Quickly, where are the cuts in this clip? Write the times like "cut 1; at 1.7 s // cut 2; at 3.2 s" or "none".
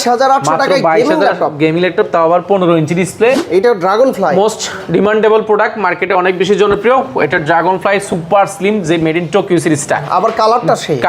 cut 1; at 3.4 s